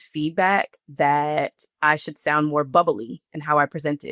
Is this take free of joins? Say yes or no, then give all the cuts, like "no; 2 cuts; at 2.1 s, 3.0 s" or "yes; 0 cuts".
yes; 0 cuts